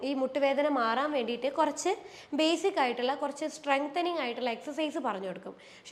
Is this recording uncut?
yes; 0 cuts

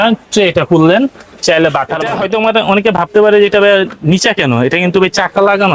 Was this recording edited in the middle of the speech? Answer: yes; 1 cut; at 2.1 s

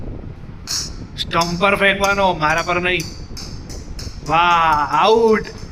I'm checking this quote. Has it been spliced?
no; 0 cuts

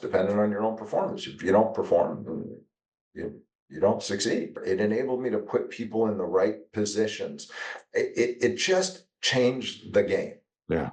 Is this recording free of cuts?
no; 1 cut; at 4.6 s

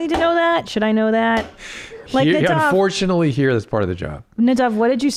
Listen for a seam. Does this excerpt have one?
no; 0 cuts

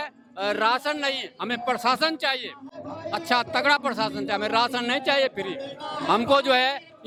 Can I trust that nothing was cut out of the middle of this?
yes; 0 cuts

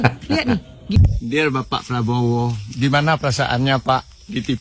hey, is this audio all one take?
no; 1 cut; at 0.9 s

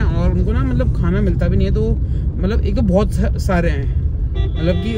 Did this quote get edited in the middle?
no; 0 cuts

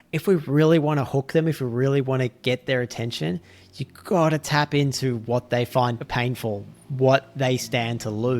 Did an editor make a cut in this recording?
yes; 1 cut; at 6.0 s

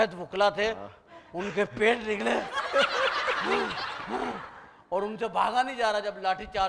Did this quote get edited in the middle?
no; 0 cuts

